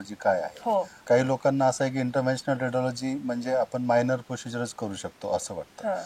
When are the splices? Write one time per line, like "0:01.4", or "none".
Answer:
0:01.0